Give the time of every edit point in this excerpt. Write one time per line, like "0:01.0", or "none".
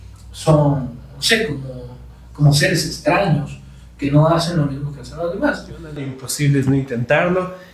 0:06.2